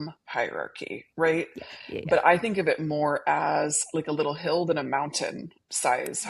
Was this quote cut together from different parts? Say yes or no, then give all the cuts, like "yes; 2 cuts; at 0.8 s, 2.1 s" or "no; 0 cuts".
no; 0 cuts